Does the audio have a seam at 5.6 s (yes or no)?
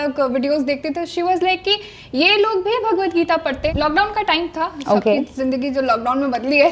no